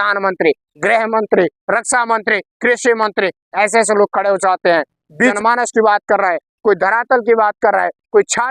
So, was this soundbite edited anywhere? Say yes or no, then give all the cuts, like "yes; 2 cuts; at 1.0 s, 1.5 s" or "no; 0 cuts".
yes; 1 cut; at 5.3 s